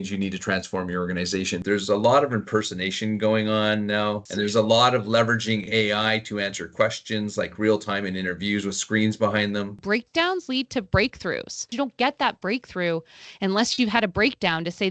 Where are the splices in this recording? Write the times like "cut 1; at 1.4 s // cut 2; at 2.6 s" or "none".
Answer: cut 1; at 1.6 s // cut 2; at 4.3 s // cut 3; at 9.8 s // cut 4; at 11.7 s